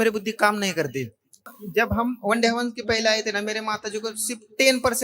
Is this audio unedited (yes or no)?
no